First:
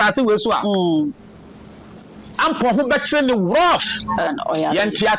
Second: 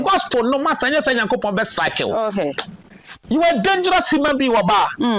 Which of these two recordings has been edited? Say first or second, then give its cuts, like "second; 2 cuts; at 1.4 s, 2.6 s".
first; 1 cut; at 4.3 s